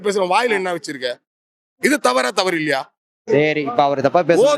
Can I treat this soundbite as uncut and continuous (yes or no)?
no